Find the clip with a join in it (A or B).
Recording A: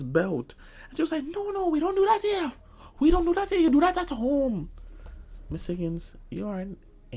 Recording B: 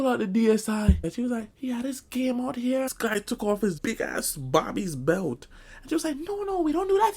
B